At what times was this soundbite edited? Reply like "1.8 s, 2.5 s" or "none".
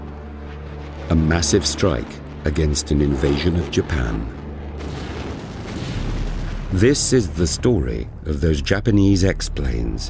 8.3 s